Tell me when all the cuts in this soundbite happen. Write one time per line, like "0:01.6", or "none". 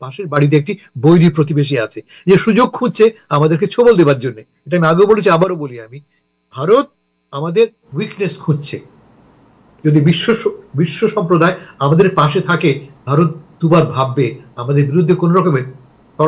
none